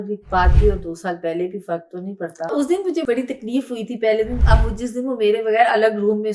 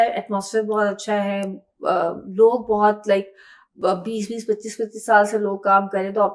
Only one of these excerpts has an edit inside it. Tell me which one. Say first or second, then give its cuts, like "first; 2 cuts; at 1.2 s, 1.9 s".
first; 1 cut; at 2.5 s